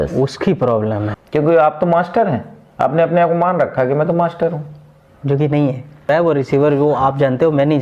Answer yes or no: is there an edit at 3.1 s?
no